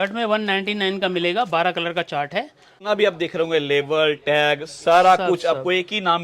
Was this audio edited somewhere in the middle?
yes; 1 cut; at 2.7 s

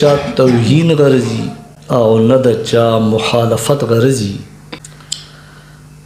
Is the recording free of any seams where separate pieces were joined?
yes; 0 cuts

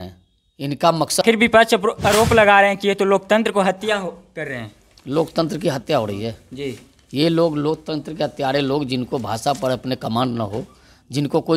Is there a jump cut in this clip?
yes; 1 cut; at 1.2 s

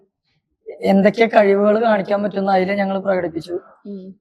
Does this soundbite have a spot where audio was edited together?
no; 0 cuts

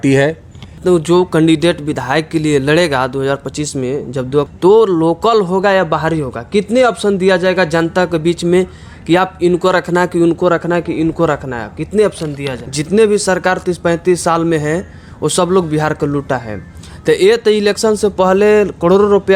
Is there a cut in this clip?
yes; 3 cuts; at 0.8 s, 4.5 s, 12.6 s

